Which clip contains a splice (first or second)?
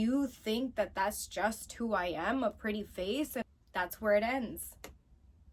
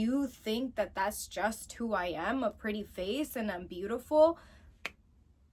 first